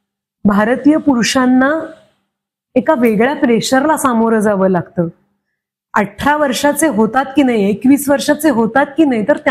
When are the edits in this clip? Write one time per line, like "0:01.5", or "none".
none